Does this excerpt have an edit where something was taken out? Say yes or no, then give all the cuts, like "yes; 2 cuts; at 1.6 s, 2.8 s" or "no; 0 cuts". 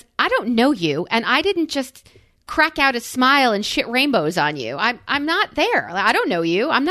no; 0 cuts